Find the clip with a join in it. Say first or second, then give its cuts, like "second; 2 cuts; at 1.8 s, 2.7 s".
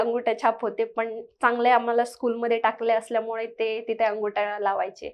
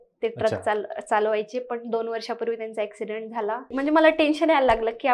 second; 1 cut; at 3.7 s